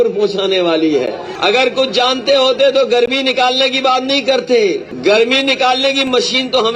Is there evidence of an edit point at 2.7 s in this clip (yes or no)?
no